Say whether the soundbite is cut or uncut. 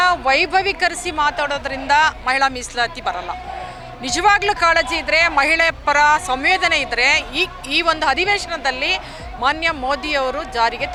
uncut